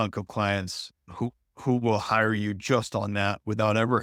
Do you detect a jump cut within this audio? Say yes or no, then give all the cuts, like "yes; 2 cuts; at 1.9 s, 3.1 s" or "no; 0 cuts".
no; 0 cuts